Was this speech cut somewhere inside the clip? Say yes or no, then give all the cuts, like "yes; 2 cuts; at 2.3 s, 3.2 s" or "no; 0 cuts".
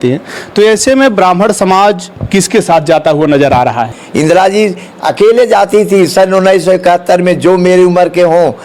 yes; 1 cut; at 4.0 s